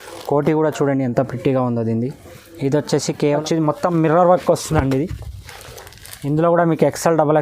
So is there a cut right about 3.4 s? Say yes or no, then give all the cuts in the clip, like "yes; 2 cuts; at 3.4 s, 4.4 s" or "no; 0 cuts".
yes; 1 cut; at 3.4 s